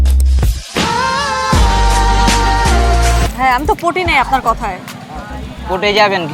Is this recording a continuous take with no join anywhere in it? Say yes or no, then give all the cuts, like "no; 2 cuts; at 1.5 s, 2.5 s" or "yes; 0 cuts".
no; 1 cut; at 3.3 s